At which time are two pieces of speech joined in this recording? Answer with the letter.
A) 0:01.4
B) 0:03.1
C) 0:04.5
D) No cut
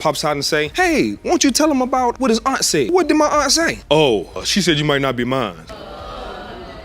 D